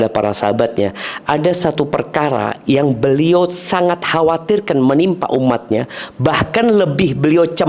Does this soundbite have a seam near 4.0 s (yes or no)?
no